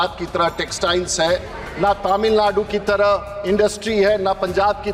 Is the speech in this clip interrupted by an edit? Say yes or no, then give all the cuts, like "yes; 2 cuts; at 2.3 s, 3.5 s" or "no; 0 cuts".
no; 0 cuts